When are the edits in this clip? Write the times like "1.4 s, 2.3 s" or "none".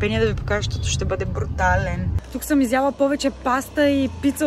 2.2 s